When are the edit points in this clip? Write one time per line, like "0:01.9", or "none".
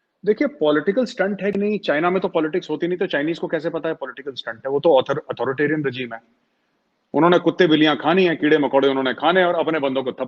none

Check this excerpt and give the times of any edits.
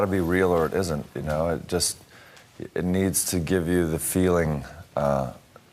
0:02.6

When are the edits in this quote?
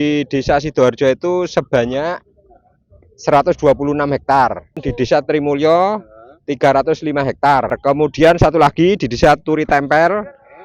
0:04.9
0:07.8

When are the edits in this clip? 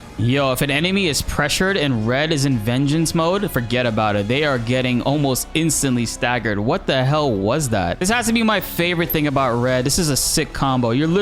0:08.0

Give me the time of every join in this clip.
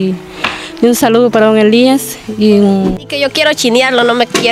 0:03.0

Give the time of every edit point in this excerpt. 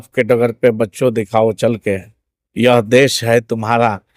none

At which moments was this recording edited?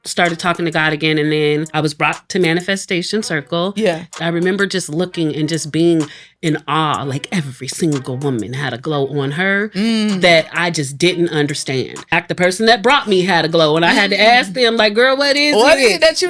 0:01.7
0:04.1
0:12.1

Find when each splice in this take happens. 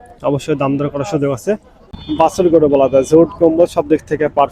0:02.3

